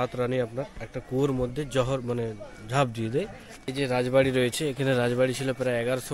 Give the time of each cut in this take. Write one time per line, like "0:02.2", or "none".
0:03.6